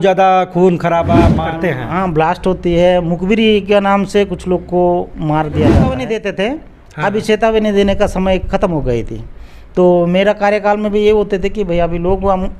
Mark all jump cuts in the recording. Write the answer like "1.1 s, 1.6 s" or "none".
1.3 s, 6.0 s